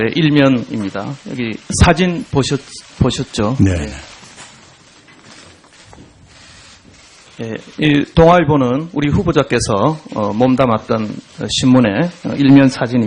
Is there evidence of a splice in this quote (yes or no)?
no